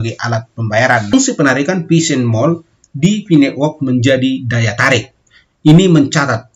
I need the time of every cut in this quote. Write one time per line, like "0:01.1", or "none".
0:01.1